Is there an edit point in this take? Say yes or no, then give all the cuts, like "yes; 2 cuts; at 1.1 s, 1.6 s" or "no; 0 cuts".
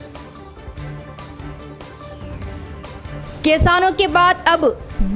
no; 0 cuts